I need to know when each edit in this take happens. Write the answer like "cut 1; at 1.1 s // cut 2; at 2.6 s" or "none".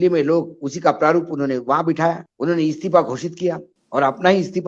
cut 1; at 2.3 s // cut 2; at 3.7 s